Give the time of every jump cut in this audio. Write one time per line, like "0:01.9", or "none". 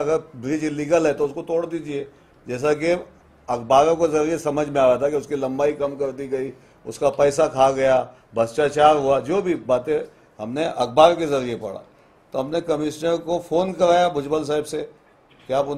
none